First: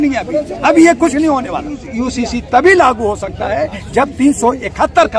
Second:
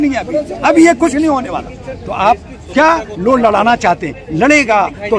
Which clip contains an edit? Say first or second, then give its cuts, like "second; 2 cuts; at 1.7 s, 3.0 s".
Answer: first; 1 cut; at 1.9 s